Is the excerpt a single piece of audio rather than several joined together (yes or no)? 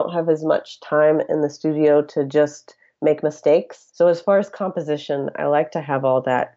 no